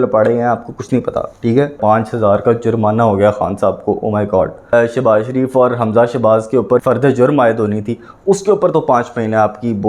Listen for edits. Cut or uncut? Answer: cut